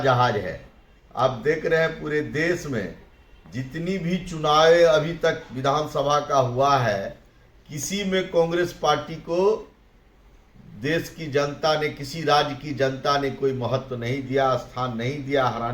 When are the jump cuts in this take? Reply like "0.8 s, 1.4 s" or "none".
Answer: none